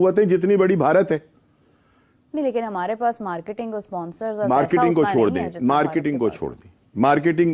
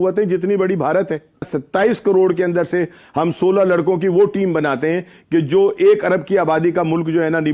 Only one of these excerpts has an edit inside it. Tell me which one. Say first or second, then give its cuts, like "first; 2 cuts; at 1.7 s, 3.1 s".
second; 1 cut; at 1.6 s